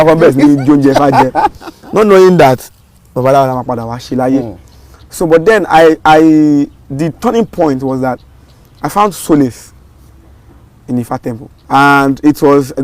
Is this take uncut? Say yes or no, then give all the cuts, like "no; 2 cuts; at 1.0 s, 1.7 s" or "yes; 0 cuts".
no; 1 cut; at 11.5 s